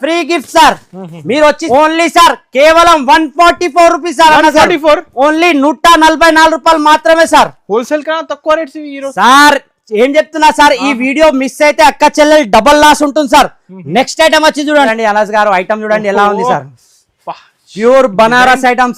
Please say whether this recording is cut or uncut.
cut